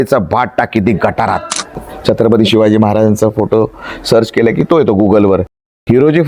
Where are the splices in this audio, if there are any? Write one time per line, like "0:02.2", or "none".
0:01.7